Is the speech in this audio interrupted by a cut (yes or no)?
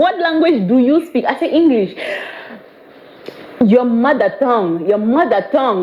no